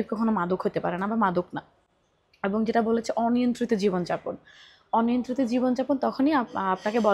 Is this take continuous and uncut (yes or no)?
yes